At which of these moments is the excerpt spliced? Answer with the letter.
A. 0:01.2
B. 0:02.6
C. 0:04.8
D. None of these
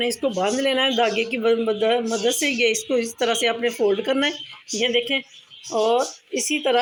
D